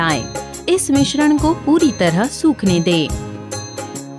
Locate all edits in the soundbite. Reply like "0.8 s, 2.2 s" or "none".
3.2 s